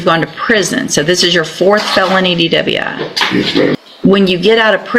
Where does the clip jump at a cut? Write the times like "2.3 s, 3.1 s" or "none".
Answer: 3.8 s